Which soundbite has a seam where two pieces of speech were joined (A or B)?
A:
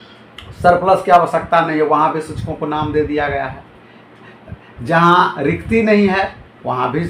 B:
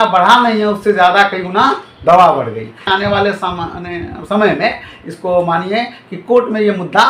B